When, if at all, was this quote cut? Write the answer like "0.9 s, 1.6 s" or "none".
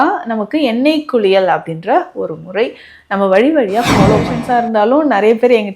4.4 s